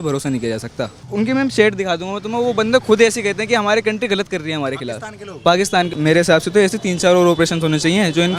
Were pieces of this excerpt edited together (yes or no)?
yes